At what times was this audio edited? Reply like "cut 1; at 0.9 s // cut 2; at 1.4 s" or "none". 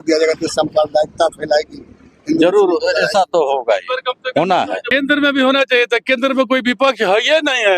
cut 1; at 4.9 s